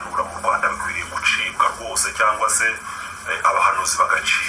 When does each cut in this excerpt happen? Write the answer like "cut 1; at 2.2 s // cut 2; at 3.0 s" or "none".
none